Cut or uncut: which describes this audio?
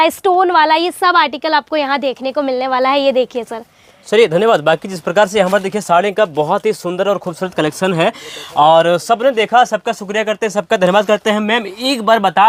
uncut